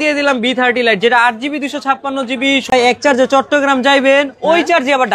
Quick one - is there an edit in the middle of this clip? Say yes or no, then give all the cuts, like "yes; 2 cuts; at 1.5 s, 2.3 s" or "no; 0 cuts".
yes; 1 cut; at 2.7 s